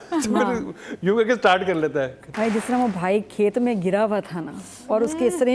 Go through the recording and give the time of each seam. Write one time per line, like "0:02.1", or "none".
0:02.3